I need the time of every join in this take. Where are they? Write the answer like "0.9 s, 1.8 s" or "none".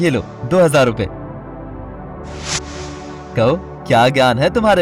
1.1 s, 3.2 s

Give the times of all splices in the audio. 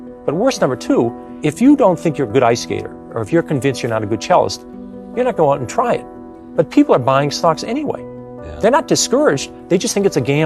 1.3 s

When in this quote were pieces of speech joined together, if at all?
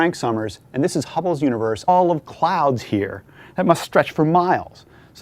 none

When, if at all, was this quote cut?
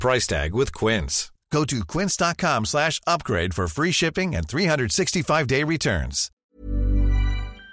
6.4 s

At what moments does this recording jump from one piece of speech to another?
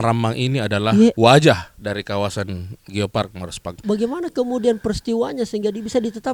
1.2 s, 3.8 s

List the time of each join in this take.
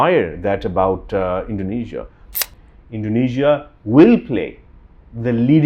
2.5 s

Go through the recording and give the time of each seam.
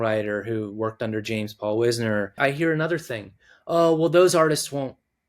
2.4 s

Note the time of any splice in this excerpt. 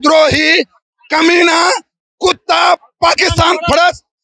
none

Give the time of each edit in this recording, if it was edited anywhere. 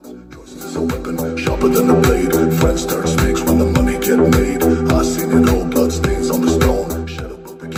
none

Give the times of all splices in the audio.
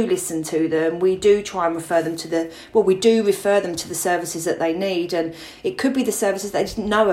none

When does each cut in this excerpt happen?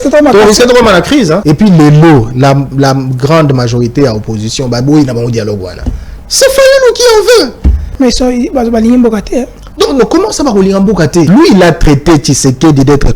1.4 s, 7.9 s, 11.3 s

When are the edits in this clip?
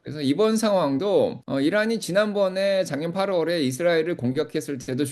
1.4 s

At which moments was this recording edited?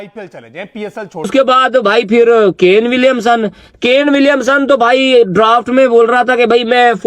1.3 s

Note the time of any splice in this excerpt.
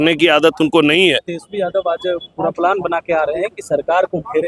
1.3 s

